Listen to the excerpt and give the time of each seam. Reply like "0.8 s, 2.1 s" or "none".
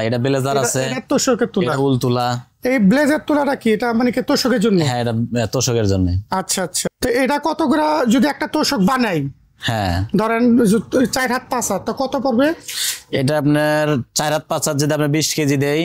6.8 s